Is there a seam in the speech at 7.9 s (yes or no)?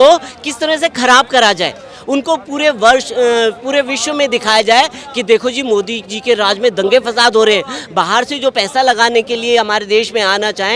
no